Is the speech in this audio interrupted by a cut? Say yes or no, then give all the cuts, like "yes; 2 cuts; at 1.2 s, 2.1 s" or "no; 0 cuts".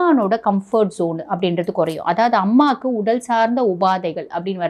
no; 0 cuts